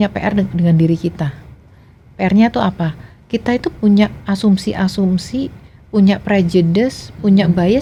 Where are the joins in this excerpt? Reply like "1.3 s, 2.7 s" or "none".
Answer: none